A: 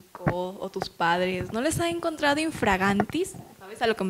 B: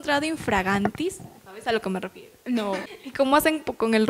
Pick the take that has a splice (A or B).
B